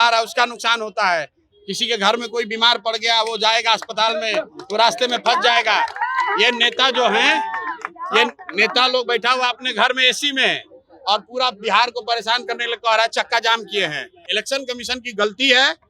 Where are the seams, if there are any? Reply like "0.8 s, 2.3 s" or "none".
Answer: 14.2 s